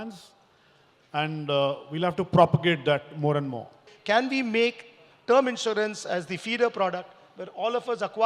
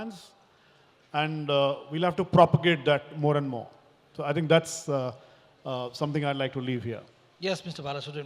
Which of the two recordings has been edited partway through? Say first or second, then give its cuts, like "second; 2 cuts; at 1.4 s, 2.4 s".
first; 1 cut; at 3.9 s